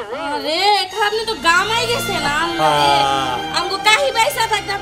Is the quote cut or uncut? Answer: uncut